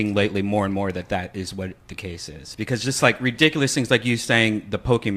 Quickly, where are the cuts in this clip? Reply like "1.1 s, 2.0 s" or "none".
none

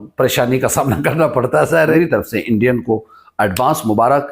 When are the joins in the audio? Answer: 2.0 s

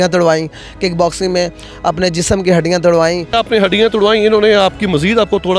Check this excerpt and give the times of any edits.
3.3 s

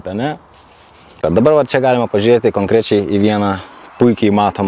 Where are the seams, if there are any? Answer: 1.2 s

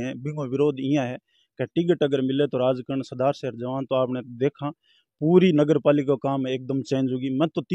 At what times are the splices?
none

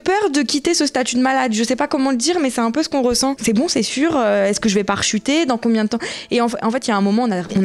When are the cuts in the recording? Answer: 3.4 s

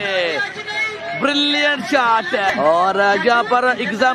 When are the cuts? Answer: 2.5 s

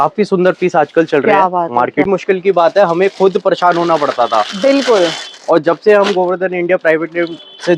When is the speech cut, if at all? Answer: 2.1 s

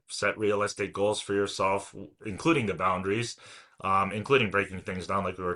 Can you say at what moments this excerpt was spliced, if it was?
none

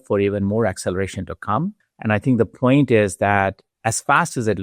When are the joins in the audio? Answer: 1.9 s, 3.7 s

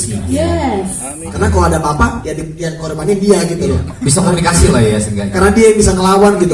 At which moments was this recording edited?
1.1 s

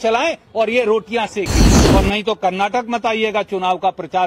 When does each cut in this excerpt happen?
1.7 s

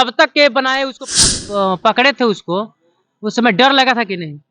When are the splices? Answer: 1.2 s

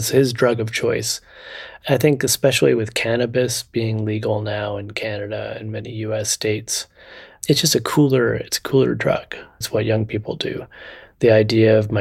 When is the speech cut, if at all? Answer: 1.7 s, 7.4 s, 9.5 s

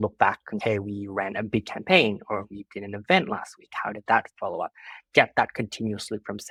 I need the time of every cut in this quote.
none

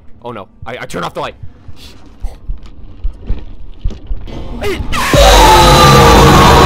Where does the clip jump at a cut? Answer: none

